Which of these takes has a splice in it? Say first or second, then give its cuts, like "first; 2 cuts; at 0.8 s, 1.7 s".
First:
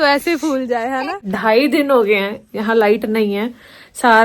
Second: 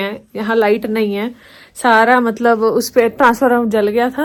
first; 1 cut; at 1.3 s